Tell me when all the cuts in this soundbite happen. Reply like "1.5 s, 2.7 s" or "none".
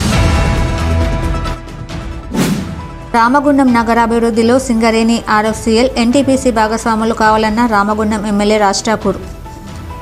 2.5 s